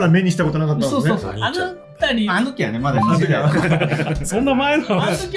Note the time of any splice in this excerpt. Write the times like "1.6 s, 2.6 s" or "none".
1.2 s, 4.2 s